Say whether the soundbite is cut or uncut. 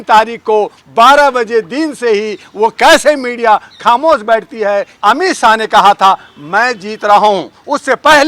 cut